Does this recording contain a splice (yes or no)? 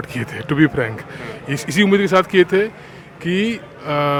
no